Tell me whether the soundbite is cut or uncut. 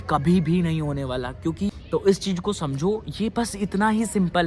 cut